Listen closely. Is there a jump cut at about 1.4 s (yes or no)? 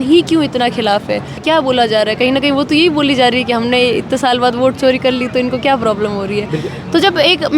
yes